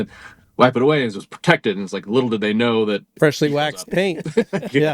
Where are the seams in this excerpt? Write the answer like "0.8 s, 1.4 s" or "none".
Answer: 3.1 s